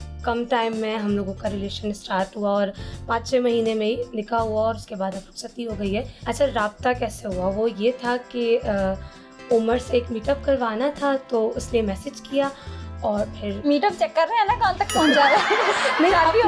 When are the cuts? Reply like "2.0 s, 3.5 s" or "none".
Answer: 6.1 s